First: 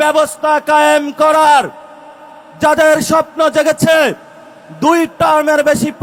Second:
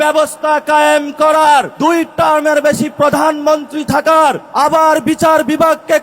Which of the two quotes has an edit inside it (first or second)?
second